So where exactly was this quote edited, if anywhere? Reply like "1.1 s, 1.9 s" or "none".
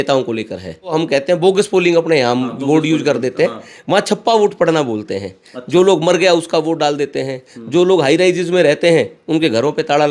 0.9 s